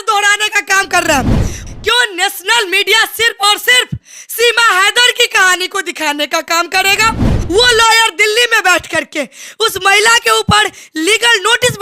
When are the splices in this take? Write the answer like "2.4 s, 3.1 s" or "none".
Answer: 1.5 s, 7.3 s